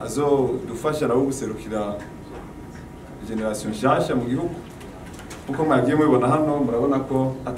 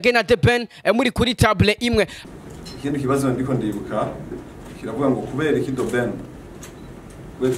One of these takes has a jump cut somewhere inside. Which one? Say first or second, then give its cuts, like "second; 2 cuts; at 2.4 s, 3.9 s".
second; 1 cut; at 2.2 s